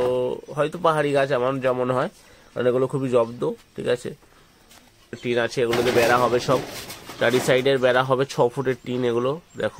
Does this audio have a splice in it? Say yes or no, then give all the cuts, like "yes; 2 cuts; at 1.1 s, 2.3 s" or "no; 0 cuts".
yes; 1 cut; at 5.2 s